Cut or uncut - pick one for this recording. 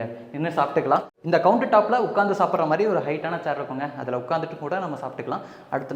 uncut